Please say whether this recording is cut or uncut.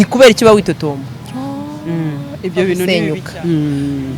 cut